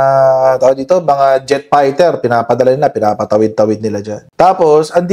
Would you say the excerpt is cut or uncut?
uncut